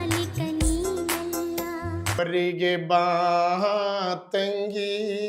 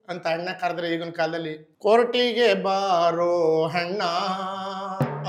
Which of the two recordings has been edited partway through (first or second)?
first